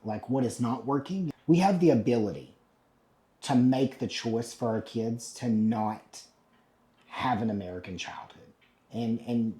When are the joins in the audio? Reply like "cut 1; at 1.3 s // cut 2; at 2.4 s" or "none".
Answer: cut 1; at 1.3 s